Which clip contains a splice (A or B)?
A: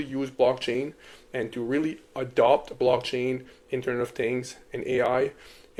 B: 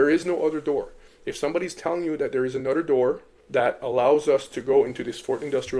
B